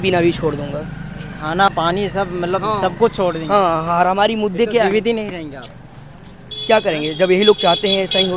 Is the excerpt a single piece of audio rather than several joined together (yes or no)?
yes